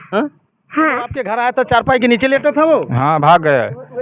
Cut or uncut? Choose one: cut